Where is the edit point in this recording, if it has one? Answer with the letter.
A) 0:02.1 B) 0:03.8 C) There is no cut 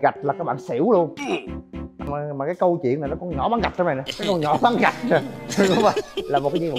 A